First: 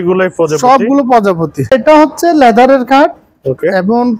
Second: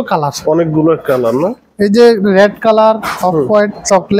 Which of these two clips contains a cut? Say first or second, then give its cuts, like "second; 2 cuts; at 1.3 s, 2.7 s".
first; 1 cut; at 1.7 s